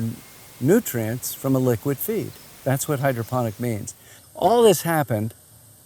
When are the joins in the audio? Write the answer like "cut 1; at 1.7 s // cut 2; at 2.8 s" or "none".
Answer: cut 1; at 4.2 s

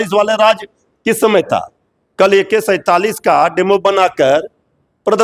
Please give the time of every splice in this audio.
none

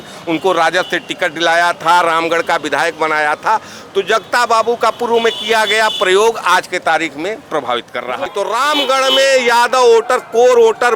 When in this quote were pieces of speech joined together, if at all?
cut 1; at 8.2 s

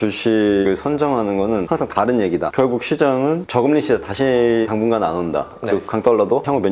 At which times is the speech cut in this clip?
cut 1; at 2.5 s // cut 2; at 5.5 s

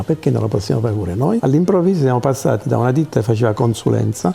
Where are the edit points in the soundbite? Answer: cut 1; at 1.4 s

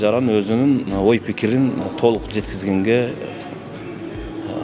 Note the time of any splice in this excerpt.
none

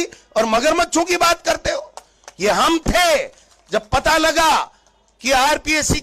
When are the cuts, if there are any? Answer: none

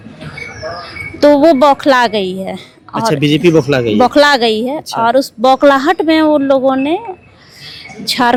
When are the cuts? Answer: none

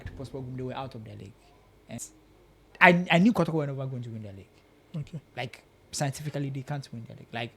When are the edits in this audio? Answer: cut 1; at 2.0 s

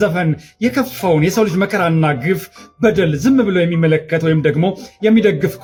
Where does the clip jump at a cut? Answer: none

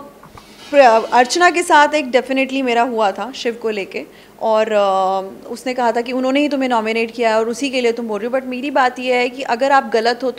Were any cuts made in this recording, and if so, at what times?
none

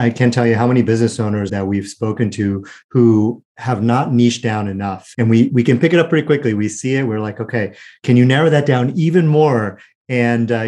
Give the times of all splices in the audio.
cut 1; at 1.5 s // cut 2; at 5.0 s // cut 3; at 7.9 s

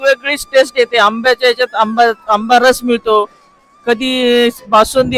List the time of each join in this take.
none

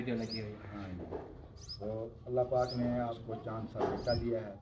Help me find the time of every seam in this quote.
cut 1; at 3.2 s

